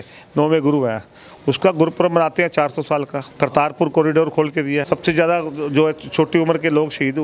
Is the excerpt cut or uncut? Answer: cut